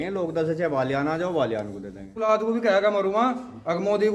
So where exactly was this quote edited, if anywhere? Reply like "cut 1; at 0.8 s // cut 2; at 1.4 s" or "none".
cut 1; at 2.2 s